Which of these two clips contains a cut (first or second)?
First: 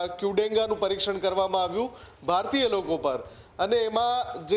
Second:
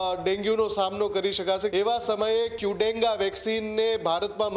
second